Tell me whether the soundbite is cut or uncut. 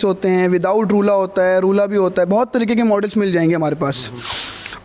uncut